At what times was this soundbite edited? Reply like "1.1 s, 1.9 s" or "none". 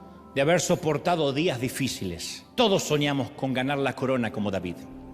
2.3 s

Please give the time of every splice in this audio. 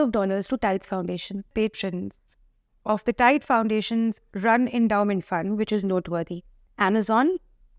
1.5 s

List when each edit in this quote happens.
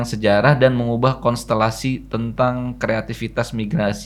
none

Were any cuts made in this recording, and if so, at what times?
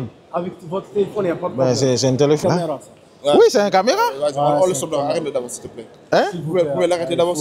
2.4 s

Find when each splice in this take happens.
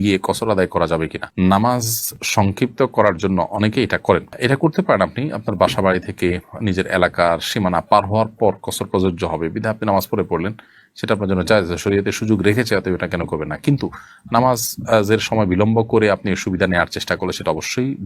none

